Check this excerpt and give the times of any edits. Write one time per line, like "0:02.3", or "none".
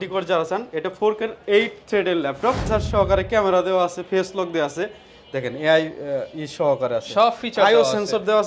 0:02.6